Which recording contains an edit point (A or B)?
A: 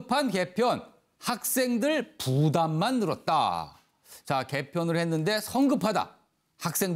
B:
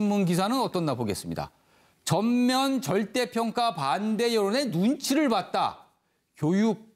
B